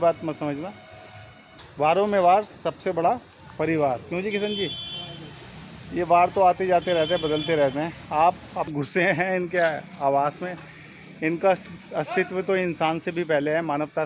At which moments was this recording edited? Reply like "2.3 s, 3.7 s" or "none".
1.6 s, 8.7 s